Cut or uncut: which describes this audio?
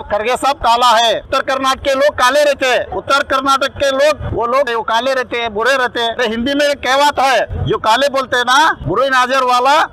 cut